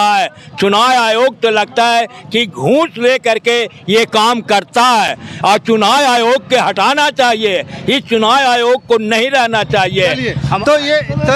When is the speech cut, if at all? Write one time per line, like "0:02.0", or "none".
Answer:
none